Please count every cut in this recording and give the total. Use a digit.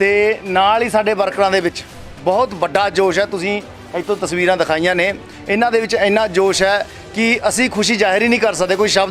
0